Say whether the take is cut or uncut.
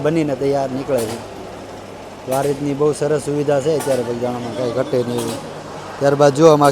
uncut